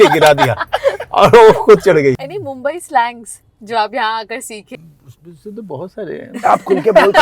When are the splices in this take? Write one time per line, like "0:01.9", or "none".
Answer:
0:02.3
0:04.7